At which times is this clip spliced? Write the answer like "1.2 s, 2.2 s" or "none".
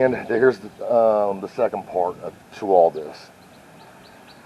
none